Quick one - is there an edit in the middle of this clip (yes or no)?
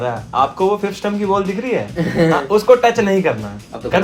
no